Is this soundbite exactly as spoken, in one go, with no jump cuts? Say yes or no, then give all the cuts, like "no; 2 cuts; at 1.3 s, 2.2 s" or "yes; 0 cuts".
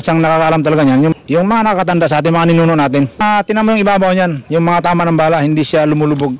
no; 2 cuts; at 1.1 s, 3.2 s